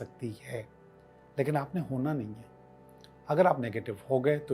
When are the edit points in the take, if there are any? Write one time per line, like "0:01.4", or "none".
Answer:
none